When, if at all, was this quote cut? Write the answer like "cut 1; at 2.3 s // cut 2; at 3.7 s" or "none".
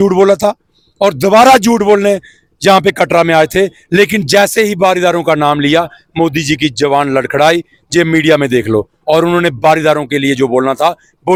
none